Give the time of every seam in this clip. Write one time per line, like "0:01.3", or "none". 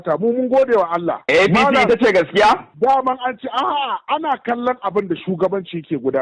0:02.7